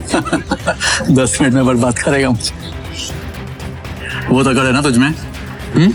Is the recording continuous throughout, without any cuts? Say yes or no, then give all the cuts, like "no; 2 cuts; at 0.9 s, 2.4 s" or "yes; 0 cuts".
yes; 0 cuts